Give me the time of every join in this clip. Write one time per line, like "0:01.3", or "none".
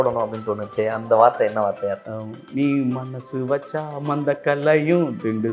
0:02.0